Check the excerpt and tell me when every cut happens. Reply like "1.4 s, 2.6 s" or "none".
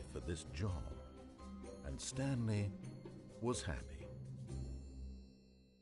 3.8 s